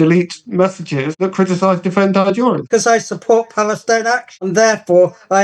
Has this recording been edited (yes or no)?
yes